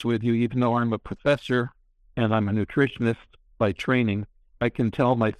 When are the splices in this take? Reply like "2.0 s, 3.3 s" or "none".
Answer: none